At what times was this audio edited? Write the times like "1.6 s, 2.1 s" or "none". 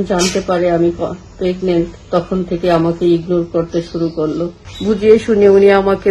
4.6 s